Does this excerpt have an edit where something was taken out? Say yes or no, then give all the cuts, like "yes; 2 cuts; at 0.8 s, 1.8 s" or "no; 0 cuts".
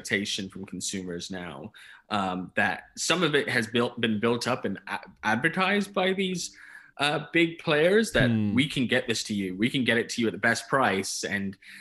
no; 0 cuts